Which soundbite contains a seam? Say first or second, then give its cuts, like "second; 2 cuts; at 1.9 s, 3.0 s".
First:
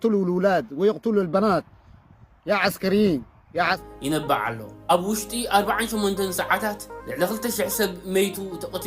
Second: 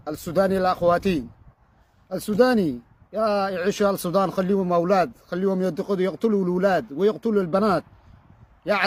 first; 1 cut; at 3.8 s